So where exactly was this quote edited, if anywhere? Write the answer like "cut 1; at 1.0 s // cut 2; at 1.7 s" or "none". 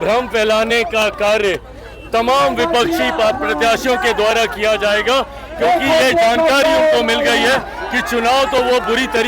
none